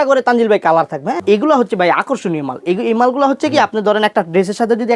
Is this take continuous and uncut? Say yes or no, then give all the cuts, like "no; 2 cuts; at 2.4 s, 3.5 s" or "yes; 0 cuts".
no; 1 cut; at 1.2 s